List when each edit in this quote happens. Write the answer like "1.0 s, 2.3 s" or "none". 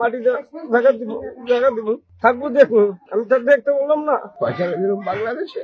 2.1 s, 3.1 s, 4.3 s